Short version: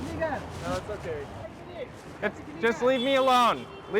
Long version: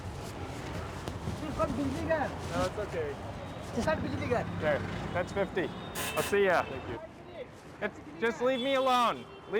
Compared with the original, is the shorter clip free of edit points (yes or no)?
no